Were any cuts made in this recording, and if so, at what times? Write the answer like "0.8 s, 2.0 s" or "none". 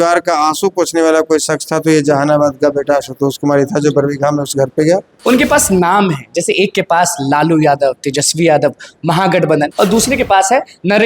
5.1 s, 9.7 s